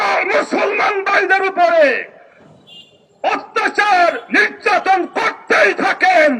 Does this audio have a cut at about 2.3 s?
no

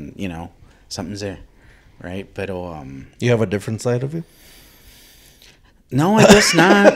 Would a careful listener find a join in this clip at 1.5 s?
no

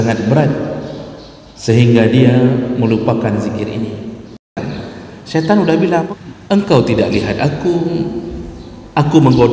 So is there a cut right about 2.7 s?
no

